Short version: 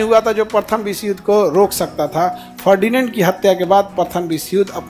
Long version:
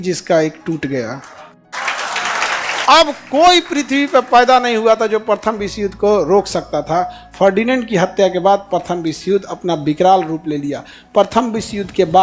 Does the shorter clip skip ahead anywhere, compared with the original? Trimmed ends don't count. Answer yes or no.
no